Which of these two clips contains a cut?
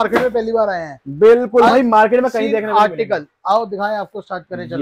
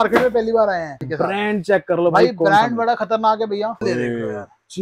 second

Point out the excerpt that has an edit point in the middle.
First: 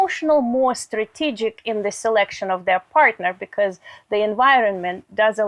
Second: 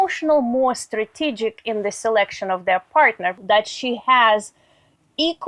second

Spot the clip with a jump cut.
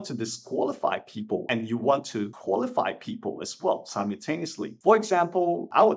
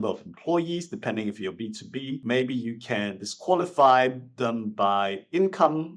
first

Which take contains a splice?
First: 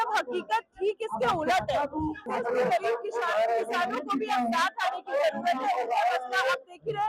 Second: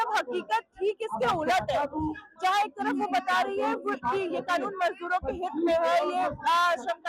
first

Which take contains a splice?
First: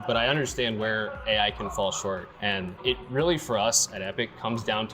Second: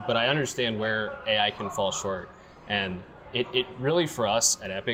first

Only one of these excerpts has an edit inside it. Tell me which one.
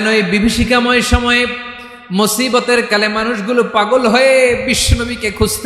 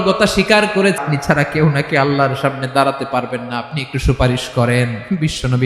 second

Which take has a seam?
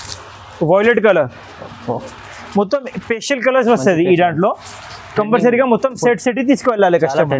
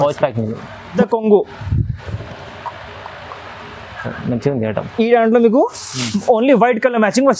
second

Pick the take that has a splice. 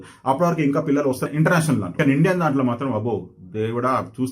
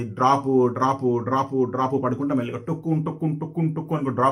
first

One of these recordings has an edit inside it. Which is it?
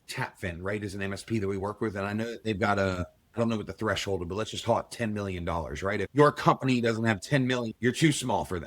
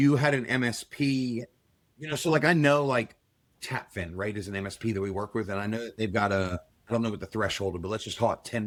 first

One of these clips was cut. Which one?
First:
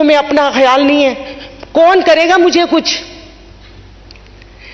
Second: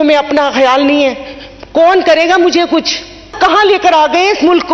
second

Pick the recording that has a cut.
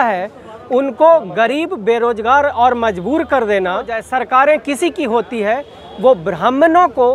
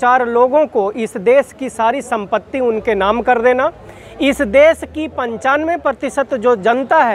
first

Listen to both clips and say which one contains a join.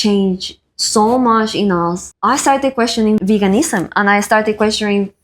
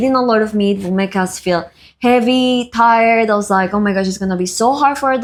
first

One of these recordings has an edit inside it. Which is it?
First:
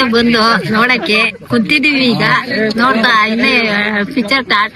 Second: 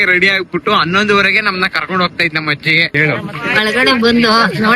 second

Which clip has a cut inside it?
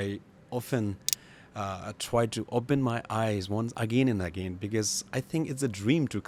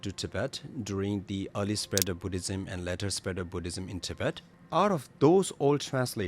second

